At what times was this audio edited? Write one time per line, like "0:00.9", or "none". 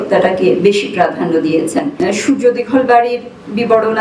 0:01.9